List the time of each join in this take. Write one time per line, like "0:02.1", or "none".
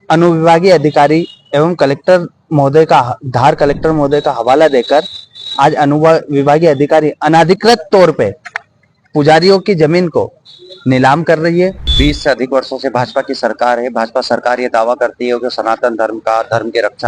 0:11.9

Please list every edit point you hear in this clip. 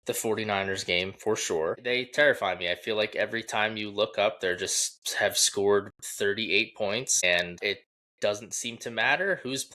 0:01.8
0:07.5

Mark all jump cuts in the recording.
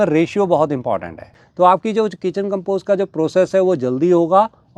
0:01.4

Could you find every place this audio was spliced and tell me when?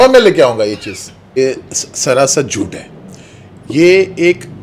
0:01.4

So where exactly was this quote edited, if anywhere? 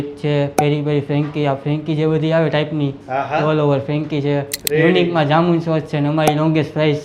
0:04.6

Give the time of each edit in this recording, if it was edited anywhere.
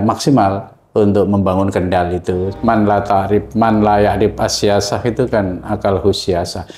0:02.5

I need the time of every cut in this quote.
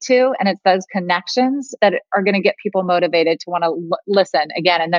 0:01.7

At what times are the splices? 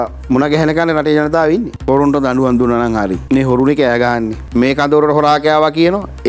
0:01.7
0:03.2
0:04.4

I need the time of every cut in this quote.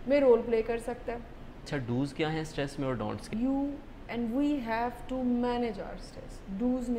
0:01.7
0:03.2

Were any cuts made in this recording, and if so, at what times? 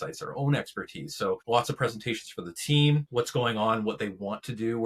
0:01.4
0:03.1

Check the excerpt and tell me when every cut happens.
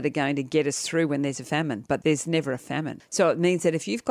0:02.0
0:03.0

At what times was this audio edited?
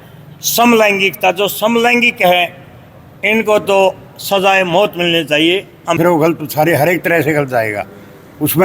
0:06.0

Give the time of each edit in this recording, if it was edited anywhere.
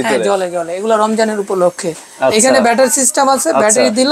none

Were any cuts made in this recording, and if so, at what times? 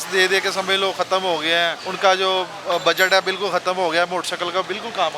0:01.8

